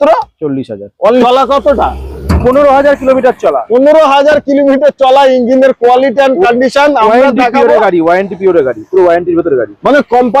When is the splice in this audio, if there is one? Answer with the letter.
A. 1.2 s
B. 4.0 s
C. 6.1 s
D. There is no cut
A